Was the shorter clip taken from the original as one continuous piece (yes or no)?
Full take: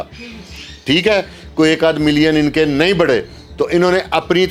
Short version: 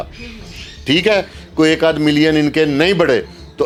yes